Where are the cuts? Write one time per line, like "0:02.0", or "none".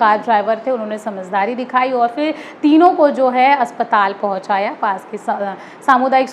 none